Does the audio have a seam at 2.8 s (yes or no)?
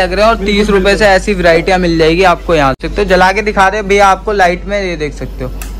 yes